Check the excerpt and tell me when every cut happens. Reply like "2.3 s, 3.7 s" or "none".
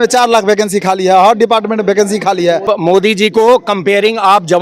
2.6 s